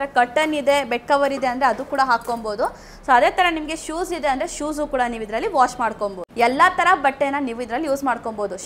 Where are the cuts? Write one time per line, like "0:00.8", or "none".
0:06.2